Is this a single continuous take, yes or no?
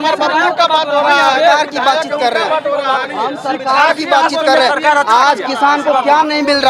yes